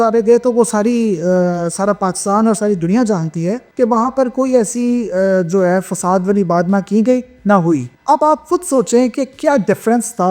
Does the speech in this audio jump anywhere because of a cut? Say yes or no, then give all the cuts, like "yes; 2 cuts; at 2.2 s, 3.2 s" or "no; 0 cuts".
yes; 2 cuts; at 3.6 s, 7.9 s